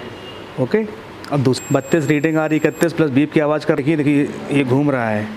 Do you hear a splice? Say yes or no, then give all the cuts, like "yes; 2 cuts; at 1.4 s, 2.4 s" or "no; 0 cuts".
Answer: yes; 2 cuts; at 1.6 s, 3.8 s